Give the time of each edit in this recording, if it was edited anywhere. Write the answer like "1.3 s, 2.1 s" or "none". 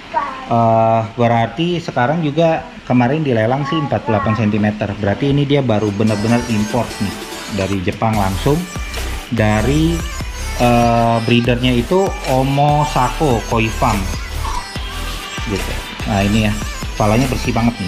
none